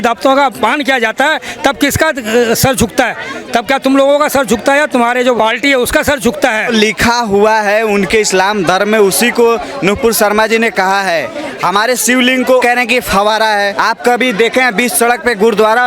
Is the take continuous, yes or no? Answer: no